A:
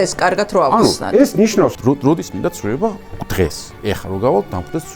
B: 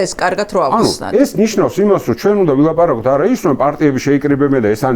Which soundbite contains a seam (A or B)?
A